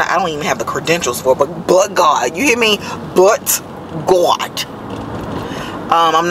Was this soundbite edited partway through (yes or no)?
no